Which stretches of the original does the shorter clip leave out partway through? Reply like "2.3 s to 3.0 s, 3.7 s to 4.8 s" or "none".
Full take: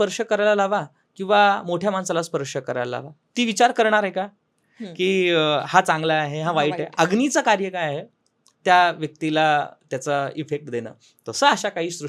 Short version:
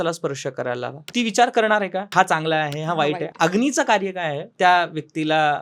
3.1 s to 3.2 s, 4.3 s to 5.7 s, 8.0 s to 8.5 s